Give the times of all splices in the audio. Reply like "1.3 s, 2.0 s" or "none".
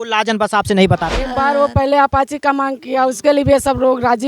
1.2 s